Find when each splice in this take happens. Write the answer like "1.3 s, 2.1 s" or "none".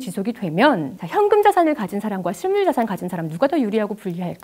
1.0 s

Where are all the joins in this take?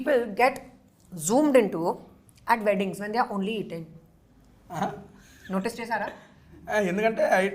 none

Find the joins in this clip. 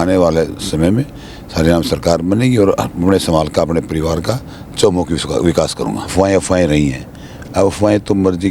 6.1 s

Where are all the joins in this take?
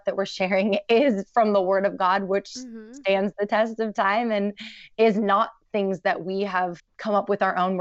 6.9 s

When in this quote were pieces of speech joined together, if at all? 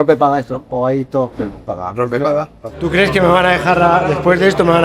1.7 s, 2.7 s

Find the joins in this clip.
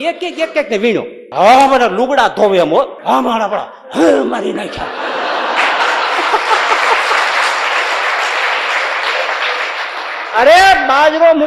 1.2 s, 3.0 s

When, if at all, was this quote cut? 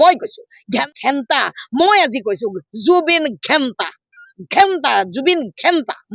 0.9 s

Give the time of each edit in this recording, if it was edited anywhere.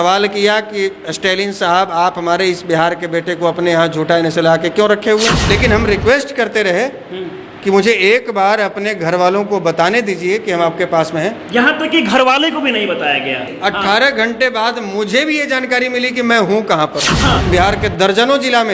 5.5 s, 13.5 s, 17.4 s

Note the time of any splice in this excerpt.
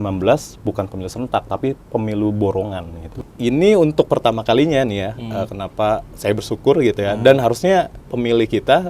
3.2 s

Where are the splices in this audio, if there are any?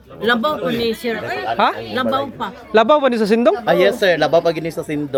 none

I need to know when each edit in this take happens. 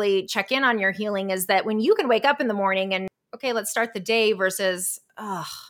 3.1 s

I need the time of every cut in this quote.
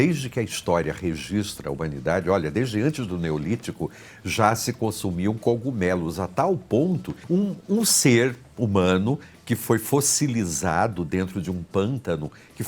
7.2 s

